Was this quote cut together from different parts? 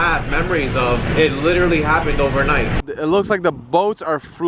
yes; 2 cuts; at 1.1 s, 2.8 s

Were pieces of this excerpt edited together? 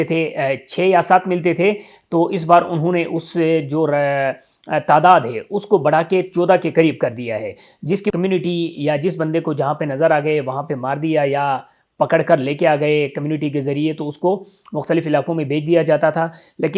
yes; 1 cut; at 8.1 s

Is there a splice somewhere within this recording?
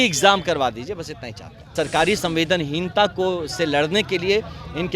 yes; 1 cut; at 1.7 s

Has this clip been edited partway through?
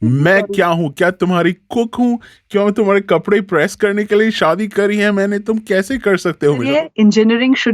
yes; 1 cut; at 6.7 s

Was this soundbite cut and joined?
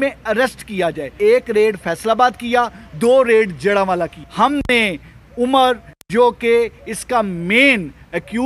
yes; 2 cuts; at 1.2 s, 4.2 s

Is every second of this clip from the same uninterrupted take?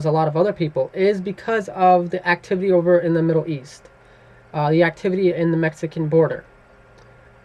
no; 1 cut; at 1.9 s

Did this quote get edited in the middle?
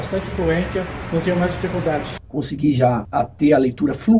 yes; 1 cut; at 2.2 s

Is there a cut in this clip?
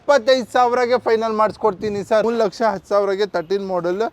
yes; 1 cut; at 2.2 s

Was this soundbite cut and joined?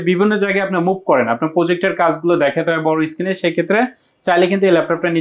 no; 0 cuts

